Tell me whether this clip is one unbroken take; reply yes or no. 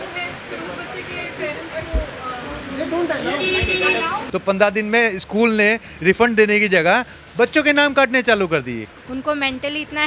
no